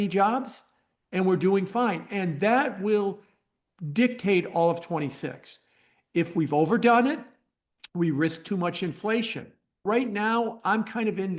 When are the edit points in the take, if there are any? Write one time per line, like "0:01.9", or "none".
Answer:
0:09.8